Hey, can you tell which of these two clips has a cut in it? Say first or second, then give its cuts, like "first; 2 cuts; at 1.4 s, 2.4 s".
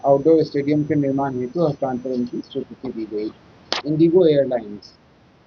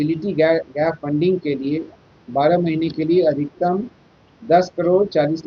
first; 1 cut; at 3.7 s